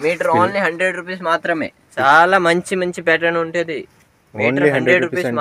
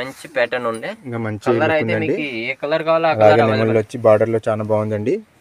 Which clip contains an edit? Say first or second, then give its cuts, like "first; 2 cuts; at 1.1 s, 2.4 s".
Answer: first; 1 cut; at 1.9 s